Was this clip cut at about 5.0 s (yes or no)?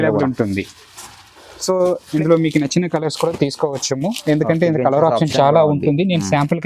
no